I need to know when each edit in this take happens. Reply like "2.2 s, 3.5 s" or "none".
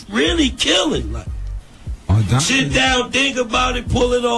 2.2 s